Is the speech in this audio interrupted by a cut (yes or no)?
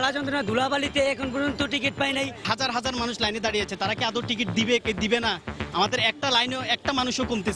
no